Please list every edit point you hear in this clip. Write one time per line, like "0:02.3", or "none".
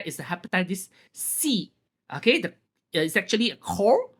none